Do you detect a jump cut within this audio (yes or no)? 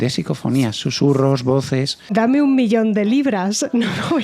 yes